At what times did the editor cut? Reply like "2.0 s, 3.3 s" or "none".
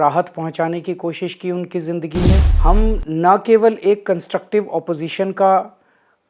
2.5 s